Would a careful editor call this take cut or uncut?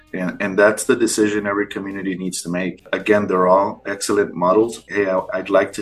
cut